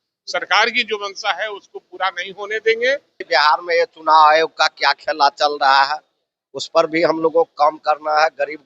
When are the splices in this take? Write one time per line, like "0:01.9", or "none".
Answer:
0:03.2